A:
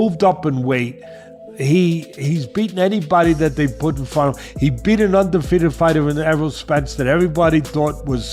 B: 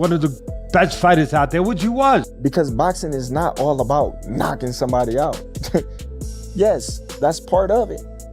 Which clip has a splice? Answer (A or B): B